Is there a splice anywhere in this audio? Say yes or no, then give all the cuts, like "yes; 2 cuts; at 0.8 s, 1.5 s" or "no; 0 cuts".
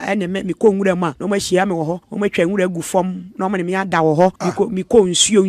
yes; 3 cuts; at 1.2 s, 2.0 s, 4.4 s